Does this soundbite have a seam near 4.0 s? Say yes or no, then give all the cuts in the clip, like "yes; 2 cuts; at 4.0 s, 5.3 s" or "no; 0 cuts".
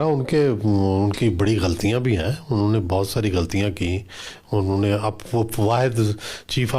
no; 0 cuts